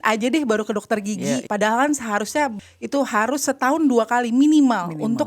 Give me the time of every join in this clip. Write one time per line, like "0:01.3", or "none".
0:01.4
0:02.6